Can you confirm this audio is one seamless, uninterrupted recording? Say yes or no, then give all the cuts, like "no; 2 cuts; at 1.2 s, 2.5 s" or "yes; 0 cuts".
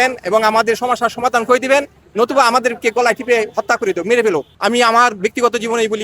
no; 1 cut; at 4.5 s